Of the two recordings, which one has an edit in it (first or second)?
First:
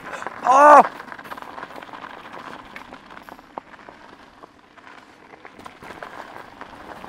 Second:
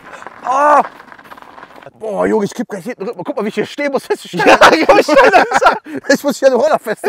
second